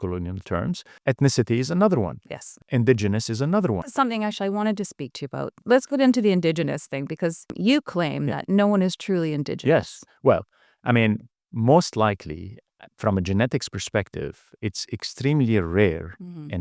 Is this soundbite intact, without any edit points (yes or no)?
no